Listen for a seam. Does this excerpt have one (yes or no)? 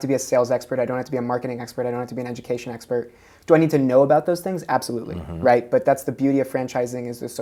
no